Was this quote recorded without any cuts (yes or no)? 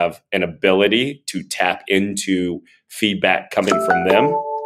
yes